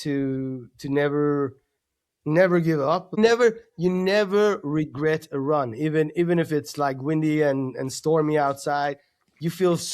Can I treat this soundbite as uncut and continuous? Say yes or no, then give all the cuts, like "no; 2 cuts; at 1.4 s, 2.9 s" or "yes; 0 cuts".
no; 1 cut; at 3.2 s